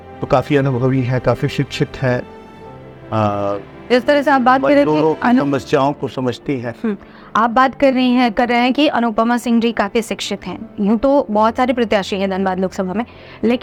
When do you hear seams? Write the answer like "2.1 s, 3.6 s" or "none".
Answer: none